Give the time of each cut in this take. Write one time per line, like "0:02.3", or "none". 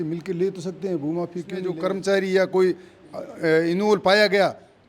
0:01.7